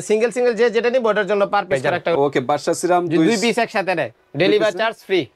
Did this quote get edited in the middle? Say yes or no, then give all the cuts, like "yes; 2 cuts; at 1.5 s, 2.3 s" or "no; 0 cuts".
yes; 1 cut; at 2.1 s